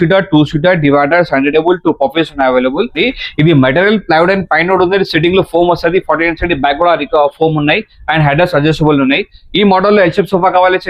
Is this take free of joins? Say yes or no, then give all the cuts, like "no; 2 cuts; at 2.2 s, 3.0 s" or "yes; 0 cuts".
no; 1 cut; at 3.0 s